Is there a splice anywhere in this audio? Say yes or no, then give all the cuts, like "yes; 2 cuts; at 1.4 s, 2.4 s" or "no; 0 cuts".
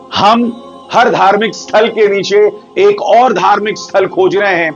no; 0 cuts